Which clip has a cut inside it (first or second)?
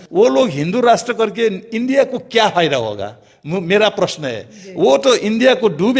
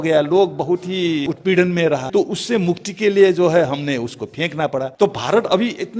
second